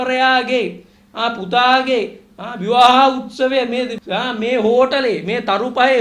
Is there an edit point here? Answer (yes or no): yes